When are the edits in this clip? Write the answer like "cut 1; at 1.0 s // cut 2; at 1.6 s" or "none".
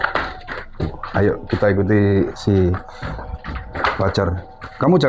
none